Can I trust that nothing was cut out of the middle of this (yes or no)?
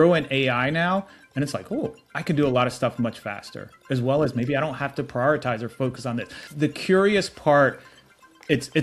no